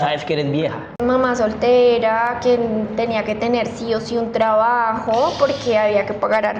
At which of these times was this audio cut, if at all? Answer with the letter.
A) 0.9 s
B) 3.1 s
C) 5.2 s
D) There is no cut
A